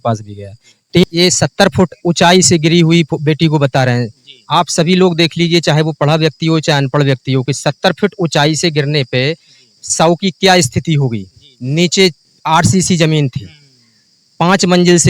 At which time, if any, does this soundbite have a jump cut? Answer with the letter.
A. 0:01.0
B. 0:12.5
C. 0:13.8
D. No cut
A